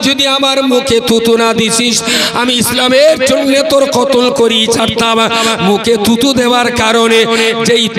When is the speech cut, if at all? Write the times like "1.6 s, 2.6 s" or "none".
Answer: none